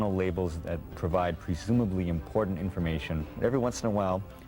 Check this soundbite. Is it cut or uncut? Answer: cut